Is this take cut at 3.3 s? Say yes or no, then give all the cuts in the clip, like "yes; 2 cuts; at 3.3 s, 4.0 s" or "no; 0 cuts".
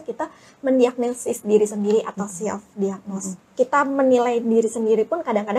yes; 1 cut; at 3.3 s